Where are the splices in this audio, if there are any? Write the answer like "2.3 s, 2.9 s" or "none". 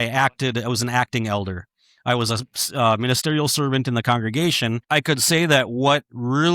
4.8 s